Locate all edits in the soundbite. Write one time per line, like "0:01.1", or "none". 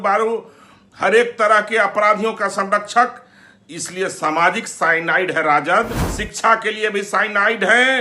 0:06.1